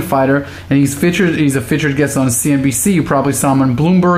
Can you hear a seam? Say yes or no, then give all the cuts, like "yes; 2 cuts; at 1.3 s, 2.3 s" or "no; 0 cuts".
no; 0 cuts